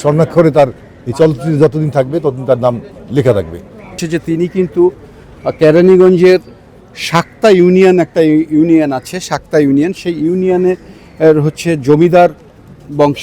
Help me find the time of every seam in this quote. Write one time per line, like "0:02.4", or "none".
0:03.9